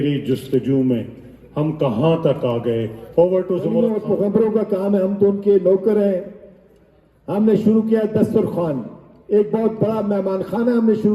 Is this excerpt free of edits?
no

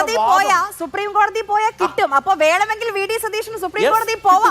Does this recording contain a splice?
no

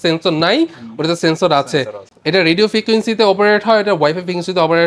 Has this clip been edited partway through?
no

